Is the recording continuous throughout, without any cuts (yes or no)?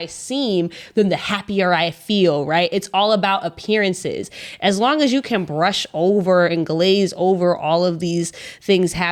yes